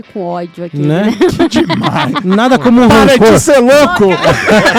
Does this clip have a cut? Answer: no; 0 cuts

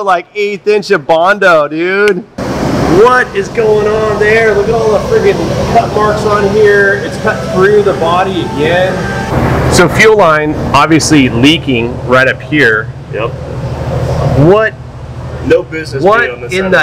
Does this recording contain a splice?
yes; 2 cuts; at 2.4 s, 9.3 s

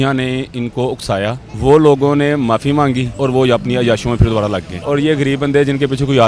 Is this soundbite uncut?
no; 3 cuts; at 1.5 s, 3.1 s, 4.8 s

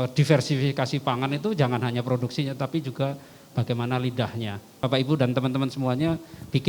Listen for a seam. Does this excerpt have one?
yes; 1 cut; at 4.8 s

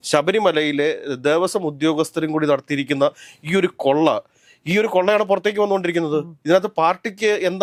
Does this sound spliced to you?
no; 0 cuts

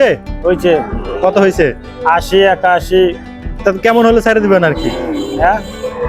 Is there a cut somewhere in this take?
no; 0 cuts

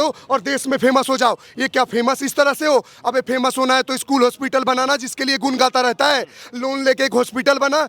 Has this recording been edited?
no; 0 cuts

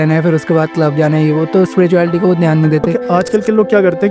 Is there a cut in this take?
yes; 1 cut; at 3.0 s

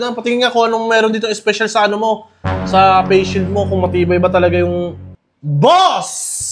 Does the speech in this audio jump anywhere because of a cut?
no; 0 cuts

